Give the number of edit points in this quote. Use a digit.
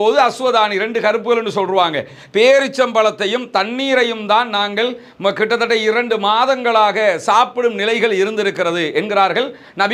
0